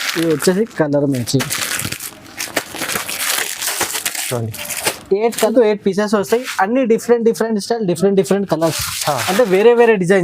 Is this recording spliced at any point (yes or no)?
yes